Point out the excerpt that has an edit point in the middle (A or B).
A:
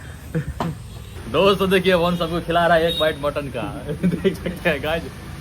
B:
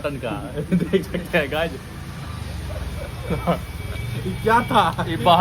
A